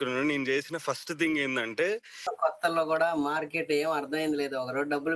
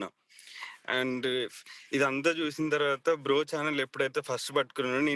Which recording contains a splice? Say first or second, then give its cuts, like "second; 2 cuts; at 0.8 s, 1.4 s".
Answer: first; 1 cut; at 2.2 s